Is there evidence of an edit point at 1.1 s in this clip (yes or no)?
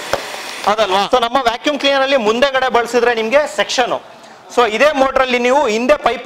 yes